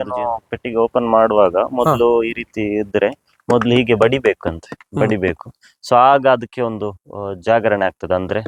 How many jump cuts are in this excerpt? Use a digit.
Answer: 0